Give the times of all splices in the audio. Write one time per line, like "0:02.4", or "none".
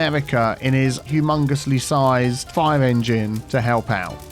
0:01.0